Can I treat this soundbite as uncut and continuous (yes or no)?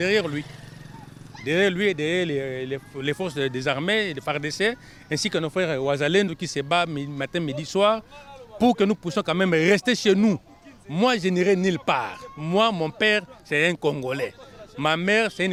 yes